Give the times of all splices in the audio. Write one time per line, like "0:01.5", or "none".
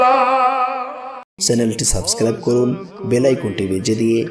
0:01.3